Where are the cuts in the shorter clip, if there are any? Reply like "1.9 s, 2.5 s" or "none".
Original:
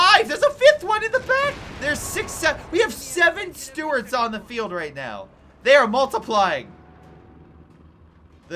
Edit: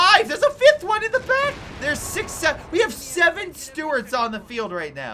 none